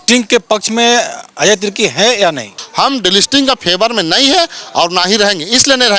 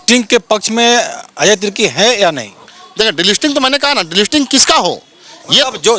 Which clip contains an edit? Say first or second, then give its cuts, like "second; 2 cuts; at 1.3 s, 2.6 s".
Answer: first; 1 cut; at 2.6 s